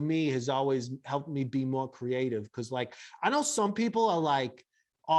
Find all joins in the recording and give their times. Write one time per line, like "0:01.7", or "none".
none